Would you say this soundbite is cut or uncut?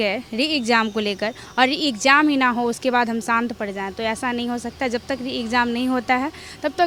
uncut